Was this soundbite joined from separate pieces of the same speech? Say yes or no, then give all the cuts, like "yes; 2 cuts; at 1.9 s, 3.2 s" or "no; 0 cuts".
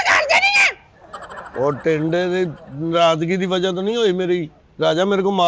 no; 0 cuts